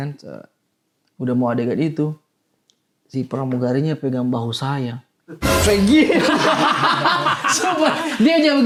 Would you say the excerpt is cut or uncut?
uncut